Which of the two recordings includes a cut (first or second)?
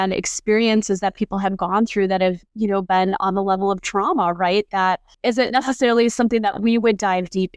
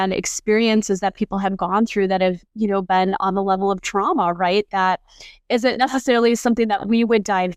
first